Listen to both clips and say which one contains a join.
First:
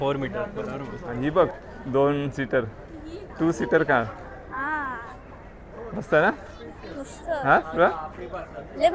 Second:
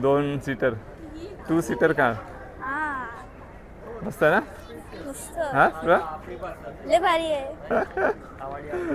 first; 1 cut; at 1.0 s

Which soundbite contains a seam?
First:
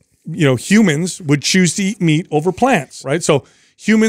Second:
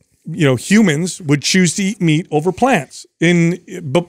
first; 1 cut; at 3.0 s

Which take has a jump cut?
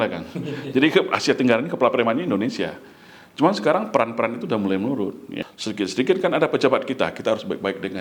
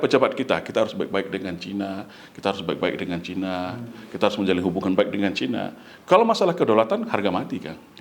first; 1 cut; at 5.4 s

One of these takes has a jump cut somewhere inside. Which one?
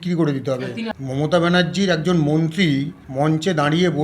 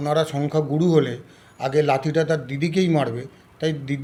first; 2 cuts; at 0.9 s, 3.0 s

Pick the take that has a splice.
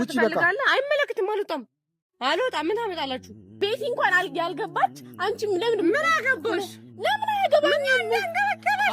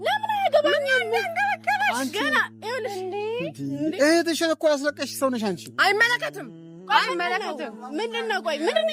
first; 1 cut; at 3.5 s

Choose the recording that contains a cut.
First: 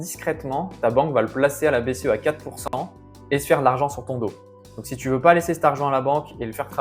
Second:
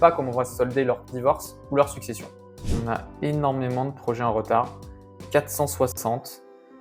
second; 1 cut; at 2.7 s

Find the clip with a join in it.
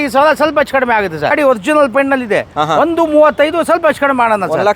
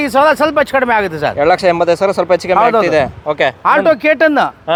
first; 1 cut; at 1.3 s

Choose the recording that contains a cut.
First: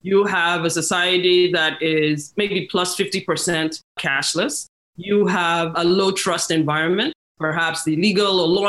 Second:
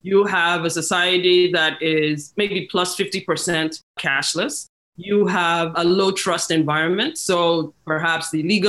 first; 1 cut; at 7.2 s

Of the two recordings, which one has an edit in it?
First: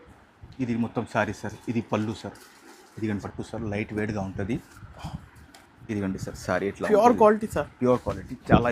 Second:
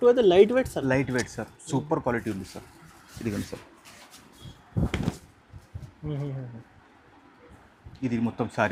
first; 1 cut; at 3.3 s

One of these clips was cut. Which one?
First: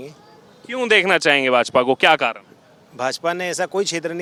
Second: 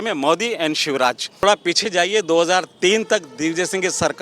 second; 1 cut; at 1.4 s

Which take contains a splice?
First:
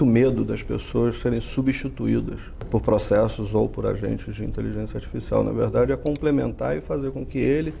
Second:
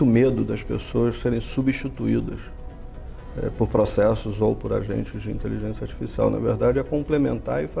first; 1 cut; at 2.7 s

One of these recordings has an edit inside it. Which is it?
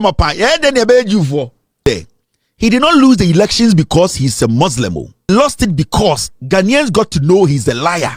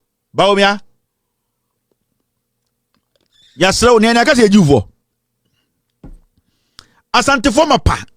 first; 2 cuts; at 1.7 s, 5.3 s

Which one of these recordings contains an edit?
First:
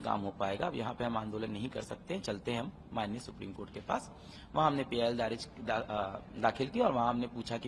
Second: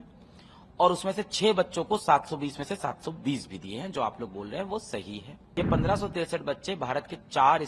second; 1 cut; at 5.4 s

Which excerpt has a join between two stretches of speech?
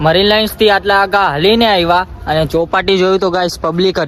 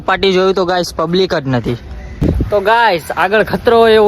second; 1 cut; at 2.4 s

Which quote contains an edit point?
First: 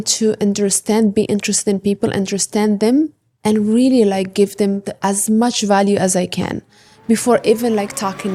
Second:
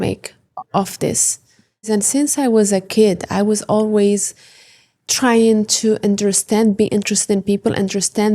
second; 1 cut; at 1.9 s

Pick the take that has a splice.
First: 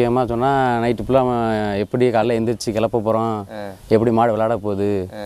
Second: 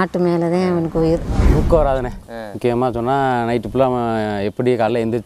second; 1 cut; at 1.5 s

